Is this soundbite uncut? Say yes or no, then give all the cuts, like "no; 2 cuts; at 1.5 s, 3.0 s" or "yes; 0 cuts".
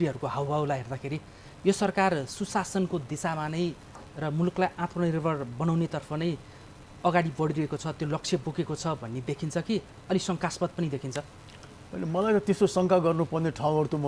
yes; 0 cuts